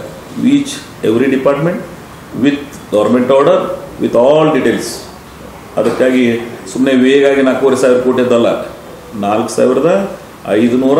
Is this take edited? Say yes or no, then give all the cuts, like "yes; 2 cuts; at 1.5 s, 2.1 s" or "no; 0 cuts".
no; 0 cuts